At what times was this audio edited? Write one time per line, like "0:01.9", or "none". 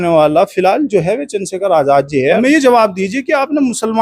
0:02.4